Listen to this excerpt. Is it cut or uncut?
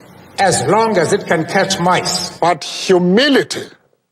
cut